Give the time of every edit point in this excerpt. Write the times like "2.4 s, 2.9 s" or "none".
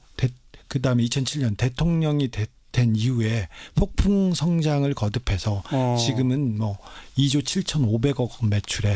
none